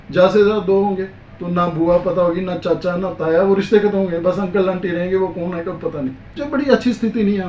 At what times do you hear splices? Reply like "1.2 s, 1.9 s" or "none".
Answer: 6.3 s